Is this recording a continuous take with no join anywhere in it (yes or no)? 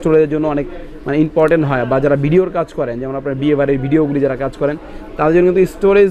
yes